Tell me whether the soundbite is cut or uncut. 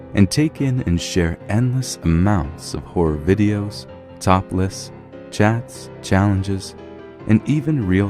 cut